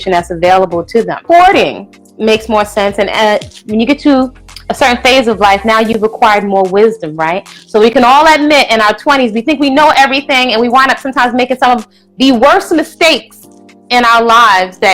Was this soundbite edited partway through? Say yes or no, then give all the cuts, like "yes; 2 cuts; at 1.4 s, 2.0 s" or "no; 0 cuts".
yes; 1 cut; at 1.2 s